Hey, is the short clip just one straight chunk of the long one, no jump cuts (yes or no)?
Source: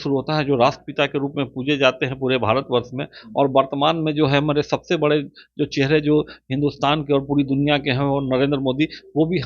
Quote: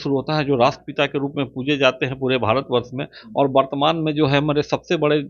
yes